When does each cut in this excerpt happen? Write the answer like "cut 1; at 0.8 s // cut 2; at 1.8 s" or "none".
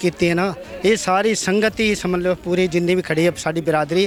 none